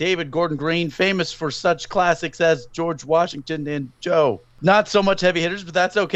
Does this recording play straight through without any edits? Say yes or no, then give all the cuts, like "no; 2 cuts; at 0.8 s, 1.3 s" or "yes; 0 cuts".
no; 1 cut; at 4.5 s